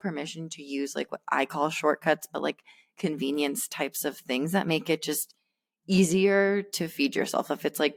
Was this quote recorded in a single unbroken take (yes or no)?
yes